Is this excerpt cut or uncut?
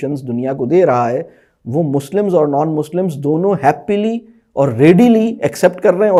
uncut